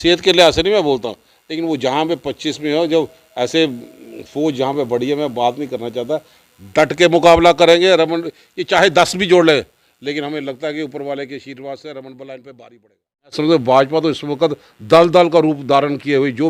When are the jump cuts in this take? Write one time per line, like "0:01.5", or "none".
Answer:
0:13.3